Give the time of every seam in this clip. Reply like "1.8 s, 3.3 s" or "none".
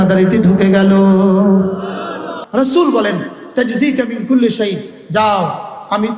2.3 s